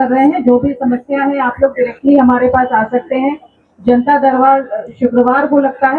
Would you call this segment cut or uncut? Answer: uncut